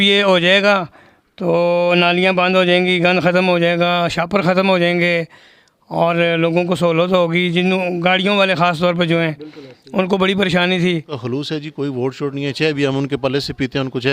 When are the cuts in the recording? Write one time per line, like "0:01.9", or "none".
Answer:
0:11.1